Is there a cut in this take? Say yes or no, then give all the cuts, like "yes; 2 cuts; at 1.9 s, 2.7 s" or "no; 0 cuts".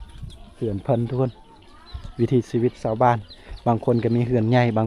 no; 0 cuts